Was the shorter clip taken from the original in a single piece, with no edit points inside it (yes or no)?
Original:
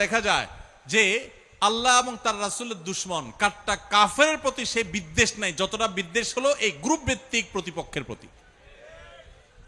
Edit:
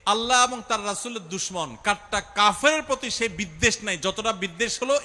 yes